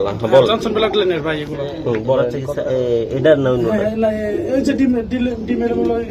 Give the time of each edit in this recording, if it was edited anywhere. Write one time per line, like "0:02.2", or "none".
0:02.4